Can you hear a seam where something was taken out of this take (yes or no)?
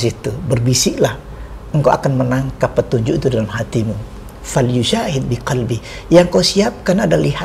no